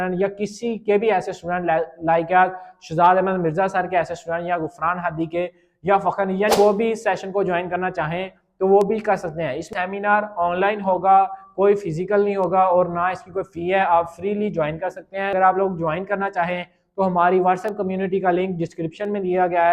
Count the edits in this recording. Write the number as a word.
three